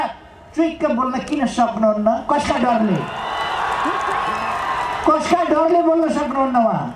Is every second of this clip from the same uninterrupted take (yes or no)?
yes